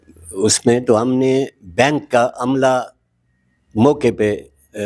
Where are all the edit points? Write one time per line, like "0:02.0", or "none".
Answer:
none